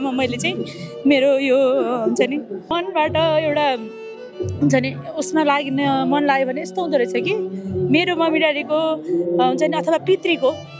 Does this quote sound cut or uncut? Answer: cut